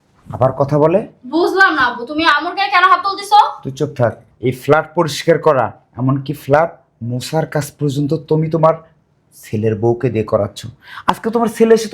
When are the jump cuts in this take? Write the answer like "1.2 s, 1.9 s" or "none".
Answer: 4.3 s